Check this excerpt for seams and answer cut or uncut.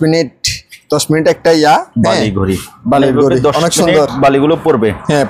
uncut